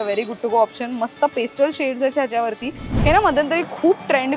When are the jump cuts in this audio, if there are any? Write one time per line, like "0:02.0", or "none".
0:02.9

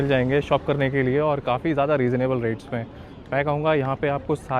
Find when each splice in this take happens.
none

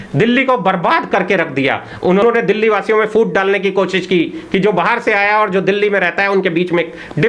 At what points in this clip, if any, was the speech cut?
0:02.2

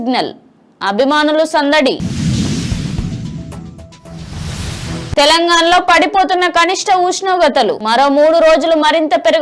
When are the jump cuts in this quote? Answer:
none

